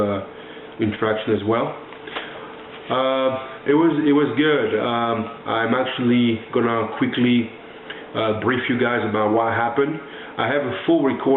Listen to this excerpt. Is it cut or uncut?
cut